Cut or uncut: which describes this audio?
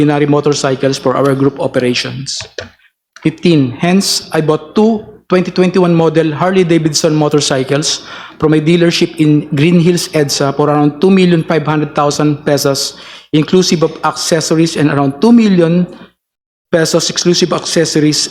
uncut